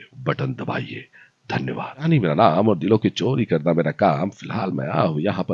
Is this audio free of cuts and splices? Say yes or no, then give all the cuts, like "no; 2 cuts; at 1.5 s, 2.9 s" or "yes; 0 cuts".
no; 1 cut; at 2.0 s